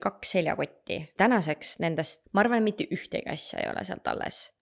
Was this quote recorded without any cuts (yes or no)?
no